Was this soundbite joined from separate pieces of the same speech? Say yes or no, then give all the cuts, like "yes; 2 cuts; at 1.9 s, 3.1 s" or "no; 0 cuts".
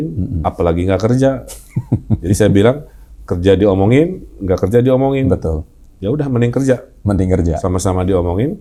no; 0 cuts